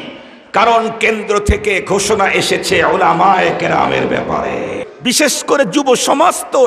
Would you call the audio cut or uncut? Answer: cut